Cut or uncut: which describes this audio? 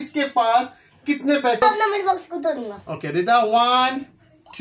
cut